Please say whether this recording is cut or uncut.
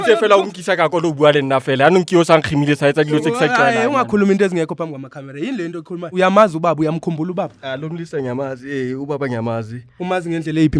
cut